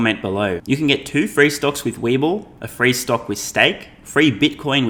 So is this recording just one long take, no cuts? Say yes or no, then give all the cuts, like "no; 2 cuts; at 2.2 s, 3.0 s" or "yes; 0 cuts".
yes; 0 cuts